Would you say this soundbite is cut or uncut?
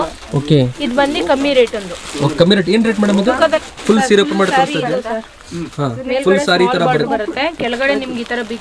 cut